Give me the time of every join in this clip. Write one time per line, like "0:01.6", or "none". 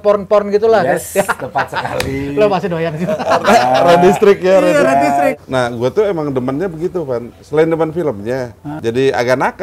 0:05.3
0:08.6